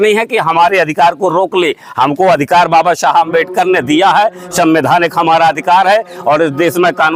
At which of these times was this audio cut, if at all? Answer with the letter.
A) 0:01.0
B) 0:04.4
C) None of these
C